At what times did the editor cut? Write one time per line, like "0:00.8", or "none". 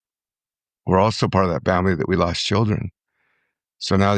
none